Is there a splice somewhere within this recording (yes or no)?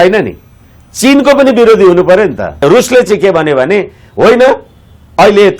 yes